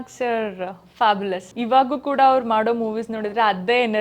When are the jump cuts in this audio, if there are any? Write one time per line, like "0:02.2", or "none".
0:01.5

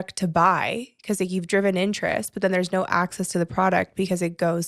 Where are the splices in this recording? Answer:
none

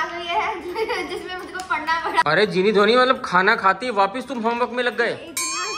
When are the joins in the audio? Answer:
0:02.2

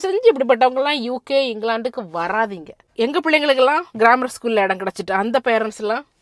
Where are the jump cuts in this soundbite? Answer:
0:02.9

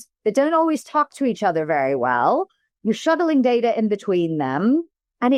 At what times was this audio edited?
none

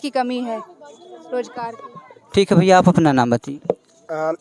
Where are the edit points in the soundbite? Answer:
none

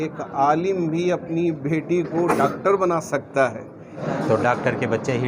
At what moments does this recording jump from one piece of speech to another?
0:03.9

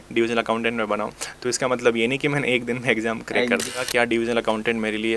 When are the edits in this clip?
0:03.8

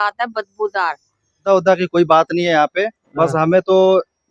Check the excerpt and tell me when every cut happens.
0:01.4

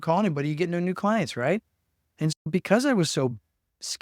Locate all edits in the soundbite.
none

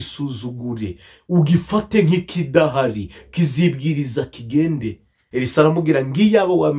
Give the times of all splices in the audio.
0:05.2

